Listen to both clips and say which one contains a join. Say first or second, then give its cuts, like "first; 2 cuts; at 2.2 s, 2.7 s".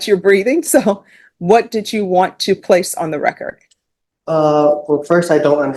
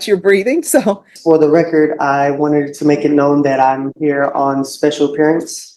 second; 1 cut; at 1.1 s